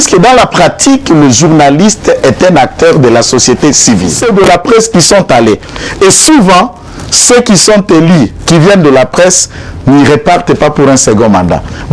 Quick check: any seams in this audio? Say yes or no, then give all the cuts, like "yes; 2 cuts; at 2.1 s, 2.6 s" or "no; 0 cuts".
yes; 1 cut; at 4.2 s